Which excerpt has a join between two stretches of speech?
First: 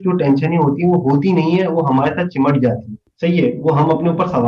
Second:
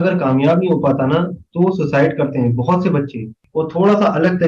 second; 1 cut; at 3.4 s

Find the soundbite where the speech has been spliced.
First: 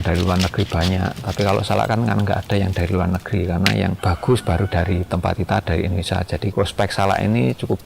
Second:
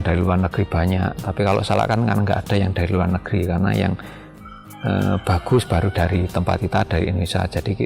first; 2 cuts; at 4.0 s, 6.5 s

